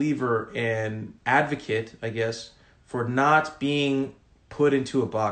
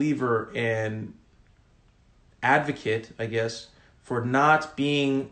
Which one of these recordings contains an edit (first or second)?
first